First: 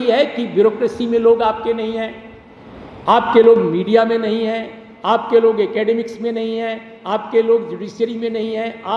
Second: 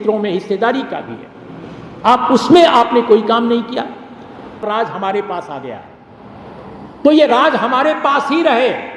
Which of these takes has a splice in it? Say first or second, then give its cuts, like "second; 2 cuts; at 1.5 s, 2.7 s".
second; 1 cut; at 4.5 s